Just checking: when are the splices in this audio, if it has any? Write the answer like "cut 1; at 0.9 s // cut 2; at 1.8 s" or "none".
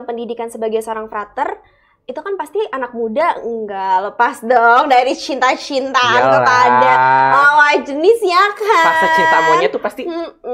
none